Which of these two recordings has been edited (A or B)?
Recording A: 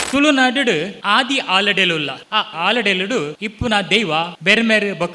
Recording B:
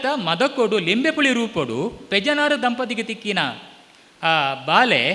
A